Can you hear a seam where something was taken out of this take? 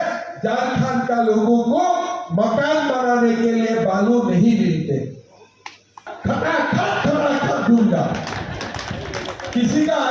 yes; 1 cut; at 6.1 s

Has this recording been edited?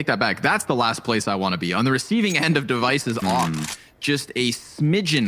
no; 0 cuts

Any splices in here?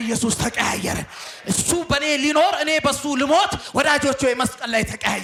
no; 0 cuts

